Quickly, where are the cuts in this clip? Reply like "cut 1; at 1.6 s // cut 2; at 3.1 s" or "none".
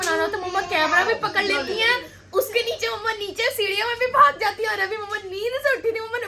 none